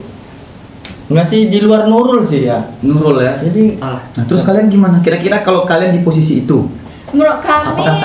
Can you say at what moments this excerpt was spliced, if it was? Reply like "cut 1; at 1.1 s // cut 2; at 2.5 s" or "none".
cut 1; at 3.8 s